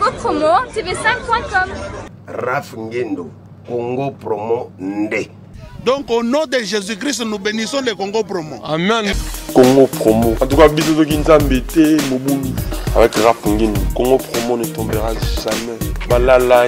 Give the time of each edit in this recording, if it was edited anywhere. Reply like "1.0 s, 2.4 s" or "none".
none